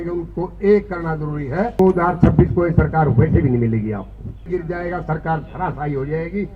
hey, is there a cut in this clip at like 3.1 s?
no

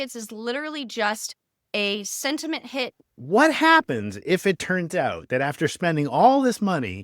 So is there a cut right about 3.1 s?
yes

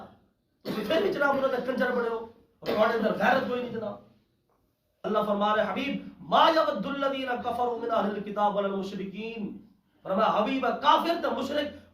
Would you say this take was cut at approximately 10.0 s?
no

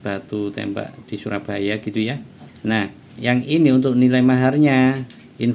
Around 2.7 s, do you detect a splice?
yes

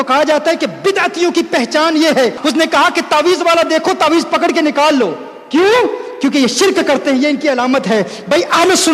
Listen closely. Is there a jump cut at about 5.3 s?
no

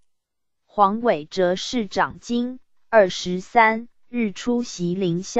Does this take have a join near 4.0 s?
yes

